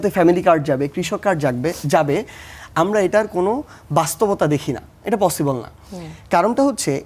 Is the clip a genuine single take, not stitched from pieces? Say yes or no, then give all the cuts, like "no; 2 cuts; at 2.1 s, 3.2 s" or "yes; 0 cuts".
yes; 0 cuts